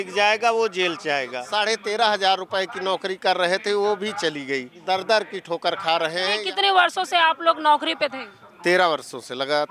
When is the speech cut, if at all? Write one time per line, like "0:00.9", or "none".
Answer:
0:01.4
0:04.7
0:06.4